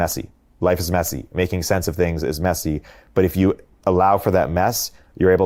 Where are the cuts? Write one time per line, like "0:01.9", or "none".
none